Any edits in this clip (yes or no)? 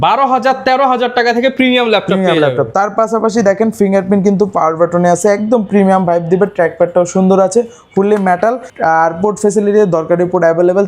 no